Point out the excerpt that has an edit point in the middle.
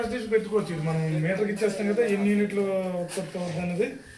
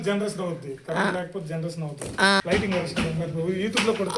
second; 1 cut; at 2.4 s

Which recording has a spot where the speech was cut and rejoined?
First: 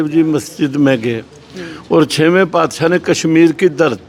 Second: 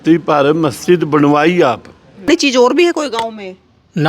second; 1 cut; at 2.3 s

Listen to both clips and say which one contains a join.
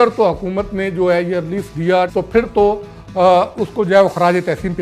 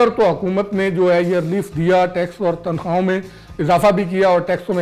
first; 1 cut; at 2.3 s

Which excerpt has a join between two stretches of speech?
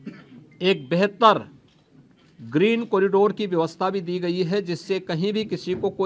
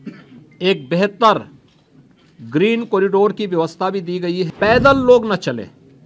second; 1 cut; at 4.5 s

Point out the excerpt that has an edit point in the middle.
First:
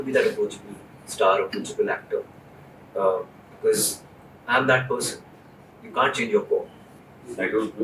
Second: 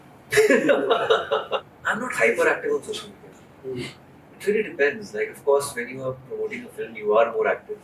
second; 1 cut; at 1.5 s

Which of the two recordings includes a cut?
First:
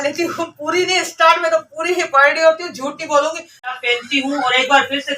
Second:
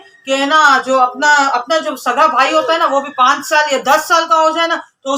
first; 1 cut; at 3.7 s

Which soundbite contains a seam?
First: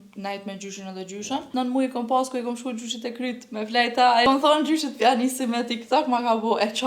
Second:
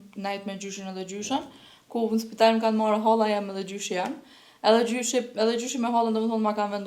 first; 2 cuts; at 1.5 s, 4.3 s

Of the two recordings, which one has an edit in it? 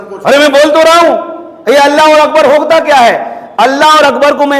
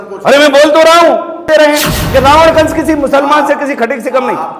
second; 1 cut; at 1.4 s

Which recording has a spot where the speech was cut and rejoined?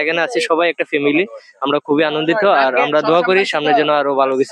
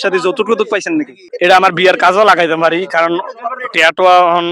second; 1 cut; at 1.2 s

